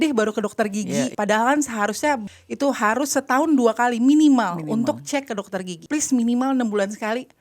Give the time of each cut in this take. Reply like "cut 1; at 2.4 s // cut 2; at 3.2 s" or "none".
cut 1; at 1.1 s // cut 2; at 2.3 s // cut 3; at 5.8 s